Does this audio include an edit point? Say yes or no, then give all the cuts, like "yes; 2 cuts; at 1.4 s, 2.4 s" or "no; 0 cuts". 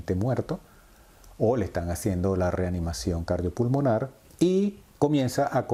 no; 0 cuts